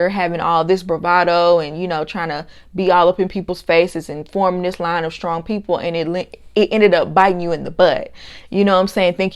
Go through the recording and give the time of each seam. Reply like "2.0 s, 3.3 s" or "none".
none